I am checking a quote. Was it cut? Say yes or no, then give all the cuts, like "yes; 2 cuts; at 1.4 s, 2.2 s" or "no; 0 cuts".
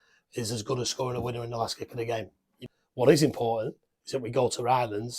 yes; 1 cut; at 2.6 s